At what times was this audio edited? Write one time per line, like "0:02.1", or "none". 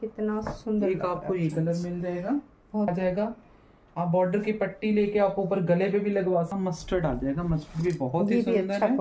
0:02.9
0:06.5